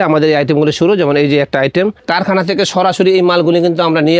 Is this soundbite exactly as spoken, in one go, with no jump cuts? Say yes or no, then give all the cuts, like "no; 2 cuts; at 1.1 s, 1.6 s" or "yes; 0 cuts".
no; 1 cut; at 2.0 s